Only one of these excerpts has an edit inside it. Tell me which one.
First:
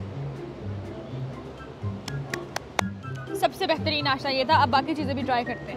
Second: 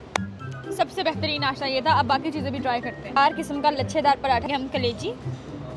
second; 1 cut; at 4.4 s

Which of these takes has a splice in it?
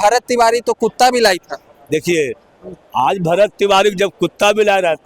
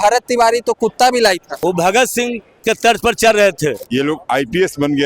second; 2 cuts; at 1.5 s, 3.8 s

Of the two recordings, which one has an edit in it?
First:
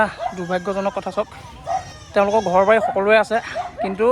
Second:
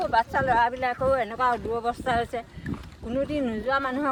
first; 1 cut; at 2.0 s

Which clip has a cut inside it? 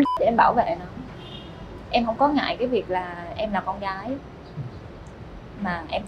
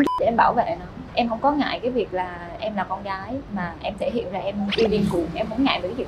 second; 3 cuts; at 0.9 s, 3.5 s, 4.7 s

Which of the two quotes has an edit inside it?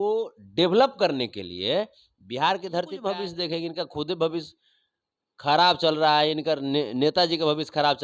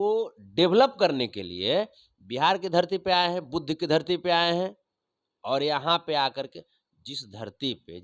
first; 1 cut; at 2.9 s

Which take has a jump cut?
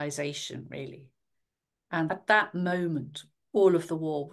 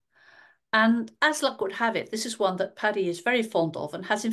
first; 1 cut; at 2.1 s

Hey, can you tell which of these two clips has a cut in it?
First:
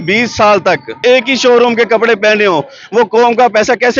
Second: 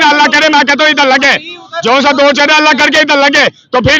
first; 1 cut; at 1.0 s

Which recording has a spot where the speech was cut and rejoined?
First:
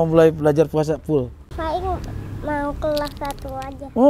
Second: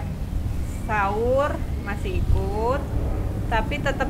first; 1 cut; at 1.4 s

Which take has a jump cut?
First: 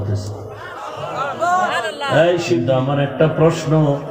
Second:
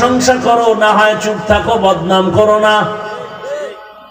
first; 1 cut; at 2.6 s

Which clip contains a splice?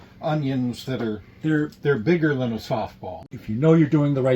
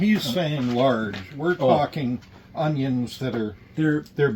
first; 1 cut; at 3.1 s

